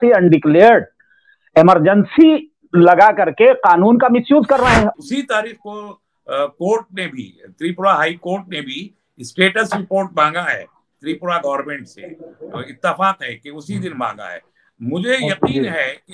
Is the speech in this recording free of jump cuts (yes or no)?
no